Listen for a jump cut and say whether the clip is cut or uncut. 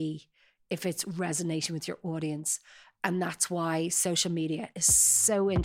uncut